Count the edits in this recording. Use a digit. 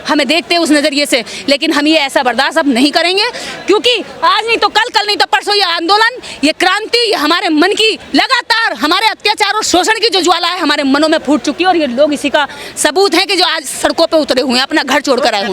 0